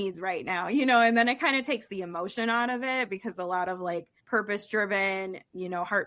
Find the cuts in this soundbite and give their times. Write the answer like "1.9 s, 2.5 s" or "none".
4.2 s

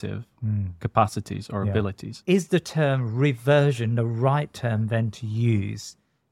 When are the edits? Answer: 2.1 s

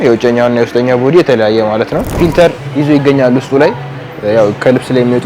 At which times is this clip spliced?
2.1 s

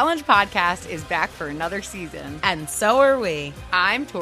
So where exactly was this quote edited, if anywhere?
1.8 s

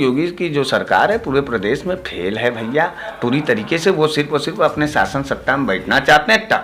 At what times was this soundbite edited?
none

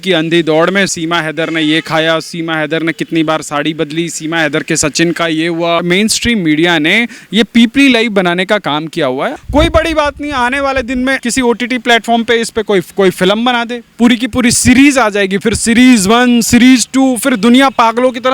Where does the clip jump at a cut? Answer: 0.9 s, 5.8 s, 9.4 s, 11.2 s, 13.9 s

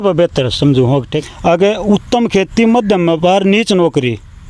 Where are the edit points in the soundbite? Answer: 1.2 s

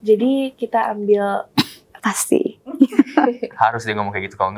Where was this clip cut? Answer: 1.8 s

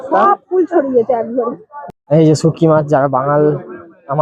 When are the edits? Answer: 1.7 s

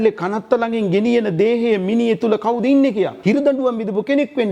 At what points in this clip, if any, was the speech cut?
3.1 s

